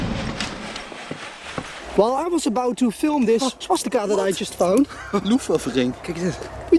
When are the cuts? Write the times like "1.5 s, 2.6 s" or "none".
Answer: 1.8 s